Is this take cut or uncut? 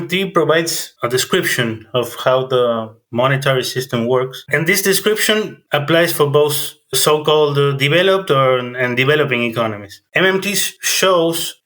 cut